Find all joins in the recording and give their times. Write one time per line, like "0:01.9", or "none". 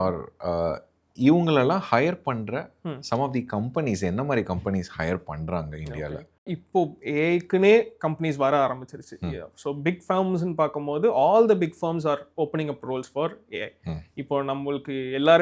0:06.5